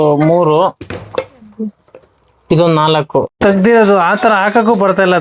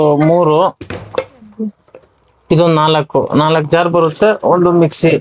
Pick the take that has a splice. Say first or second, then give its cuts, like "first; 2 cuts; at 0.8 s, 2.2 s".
first; 1 cut; at 3.3 s